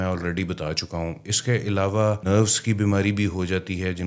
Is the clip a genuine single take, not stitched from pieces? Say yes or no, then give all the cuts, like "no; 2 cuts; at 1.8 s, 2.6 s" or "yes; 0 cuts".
no; 1 cut; at 2.2 s